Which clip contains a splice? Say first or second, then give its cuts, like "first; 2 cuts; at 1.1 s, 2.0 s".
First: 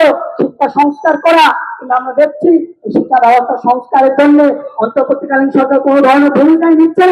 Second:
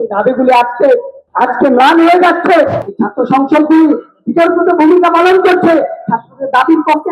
second; 2 cuts; at 1.2 s, 2.8 s